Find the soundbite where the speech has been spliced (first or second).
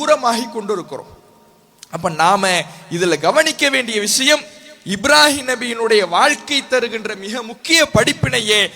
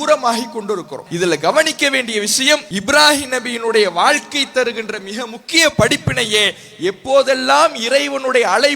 second